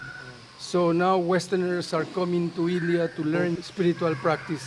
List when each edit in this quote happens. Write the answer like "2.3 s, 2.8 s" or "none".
3.6 s